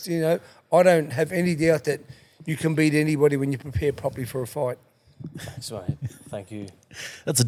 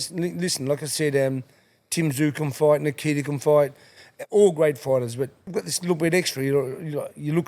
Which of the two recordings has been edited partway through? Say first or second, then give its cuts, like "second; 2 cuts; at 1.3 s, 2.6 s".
second; 1 cut; at 5.4 s